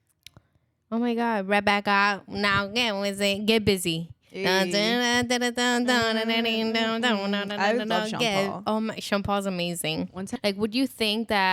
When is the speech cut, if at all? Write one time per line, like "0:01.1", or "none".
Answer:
0:10.2